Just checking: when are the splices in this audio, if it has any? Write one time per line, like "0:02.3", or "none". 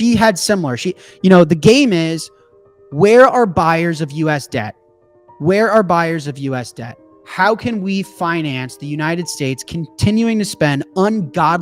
none